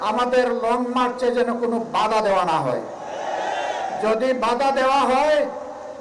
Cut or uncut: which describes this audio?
uncut